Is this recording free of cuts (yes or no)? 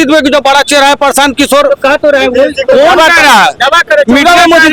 yes